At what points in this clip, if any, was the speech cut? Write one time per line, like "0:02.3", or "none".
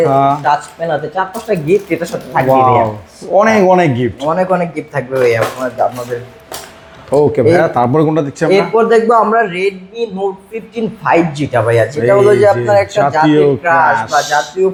none